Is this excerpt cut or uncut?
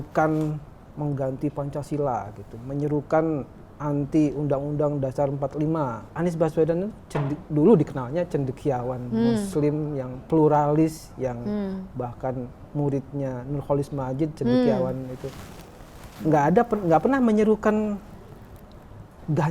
cut